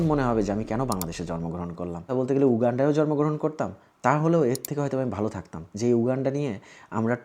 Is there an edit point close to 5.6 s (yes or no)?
yes